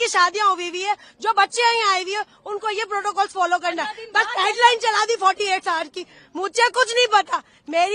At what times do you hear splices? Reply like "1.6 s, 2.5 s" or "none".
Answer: none